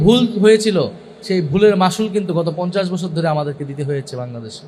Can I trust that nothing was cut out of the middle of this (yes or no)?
yes